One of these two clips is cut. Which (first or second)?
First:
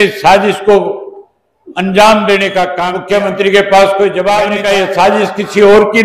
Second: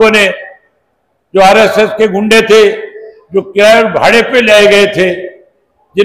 first